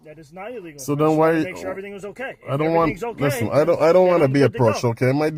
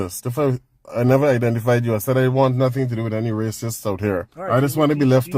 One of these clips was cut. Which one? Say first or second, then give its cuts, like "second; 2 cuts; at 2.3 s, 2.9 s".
second; 1 cut; at 4.3 s